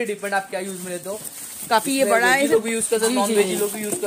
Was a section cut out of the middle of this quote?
no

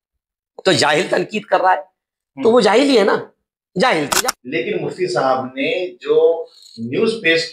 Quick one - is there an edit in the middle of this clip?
yes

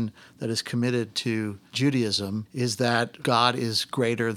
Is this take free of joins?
no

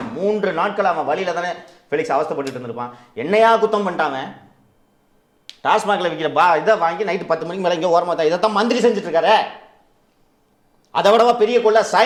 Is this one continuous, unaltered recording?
yes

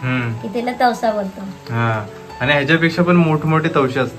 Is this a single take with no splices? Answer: yes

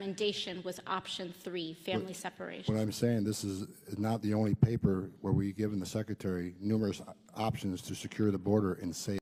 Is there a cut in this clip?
no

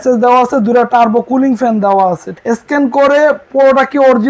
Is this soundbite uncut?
no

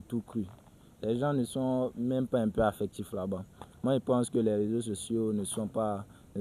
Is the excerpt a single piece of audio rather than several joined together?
yes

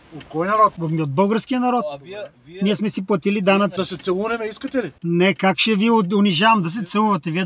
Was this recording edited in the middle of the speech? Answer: yes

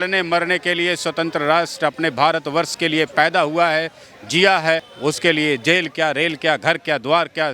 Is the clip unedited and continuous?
no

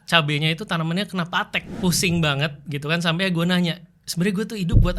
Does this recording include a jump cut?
yes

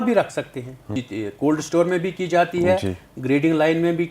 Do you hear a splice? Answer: yes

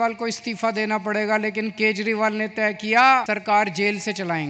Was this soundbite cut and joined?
yes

